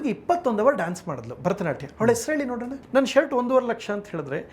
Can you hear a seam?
yes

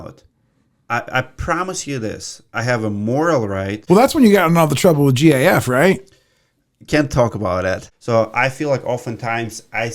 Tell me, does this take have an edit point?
yes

